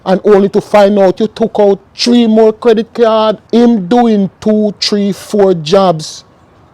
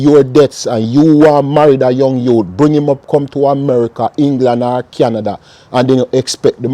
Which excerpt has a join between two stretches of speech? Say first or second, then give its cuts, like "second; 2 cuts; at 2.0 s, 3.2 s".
first; 1 cut; at 3.4 s